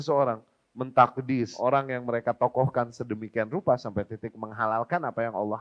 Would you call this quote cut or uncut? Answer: cut